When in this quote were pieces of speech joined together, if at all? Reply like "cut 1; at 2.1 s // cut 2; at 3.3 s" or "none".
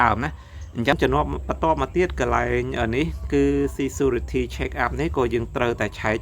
cut 1; at 0.9 s